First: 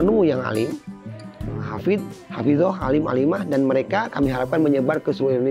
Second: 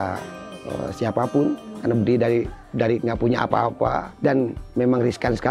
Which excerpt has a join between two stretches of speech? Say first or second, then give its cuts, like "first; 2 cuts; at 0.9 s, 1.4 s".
second; 1 cut; at 4.1 s